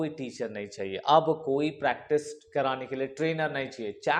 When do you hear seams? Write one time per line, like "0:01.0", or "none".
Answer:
none

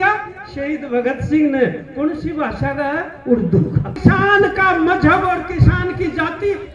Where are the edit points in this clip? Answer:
0:03.9

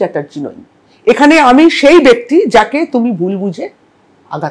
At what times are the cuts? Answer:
none

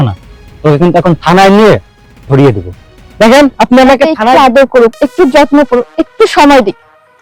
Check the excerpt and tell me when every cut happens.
0:04.2

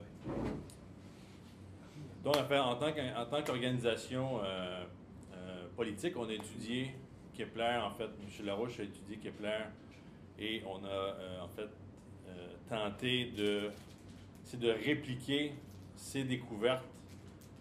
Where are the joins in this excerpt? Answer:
0:09.8

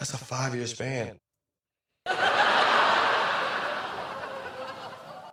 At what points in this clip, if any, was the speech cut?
none

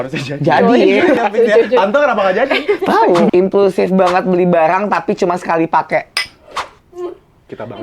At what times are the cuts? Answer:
0:01.2
0:03.3

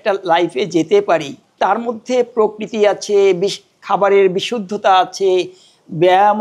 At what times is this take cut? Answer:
0:01.4

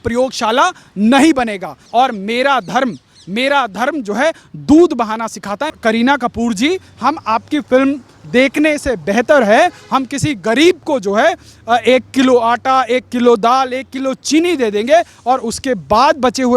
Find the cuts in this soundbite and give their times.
0:01.8
0:05.7

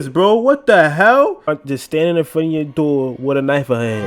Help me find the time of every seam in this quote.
0:01.5

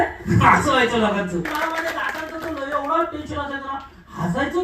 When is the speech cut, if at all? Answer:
0:01.5

